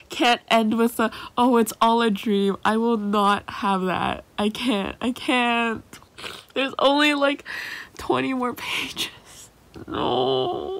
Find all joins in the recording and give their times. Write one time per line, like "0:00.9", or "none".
none